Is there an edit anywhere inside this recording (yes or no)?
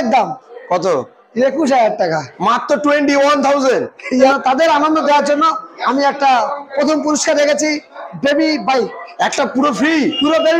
yes